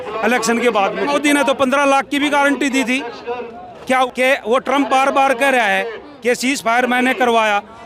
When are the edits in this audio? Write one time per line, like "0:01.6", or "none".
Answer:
0:01.1
0:04.1